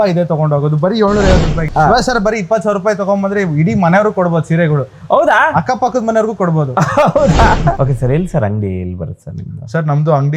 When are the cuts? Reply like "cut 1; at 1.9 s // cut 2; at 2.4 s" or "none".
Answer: cut 1; at 1.7 s // cut 2; at 7.8 s